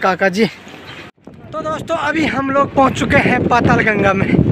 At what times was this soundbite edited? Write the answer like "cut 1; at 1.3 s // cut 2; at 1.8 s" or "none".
cut 1; at 1.3 s